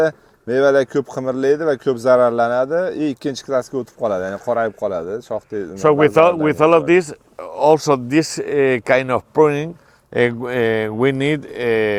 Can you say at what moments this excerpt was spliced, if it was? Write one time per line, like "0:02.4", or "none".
none